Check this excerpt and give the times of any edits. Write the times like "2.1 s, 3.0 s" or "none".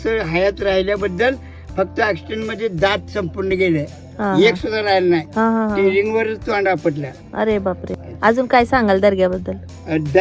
7.8 s